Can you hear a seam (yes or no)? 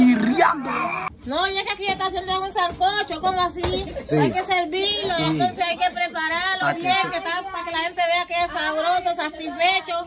yes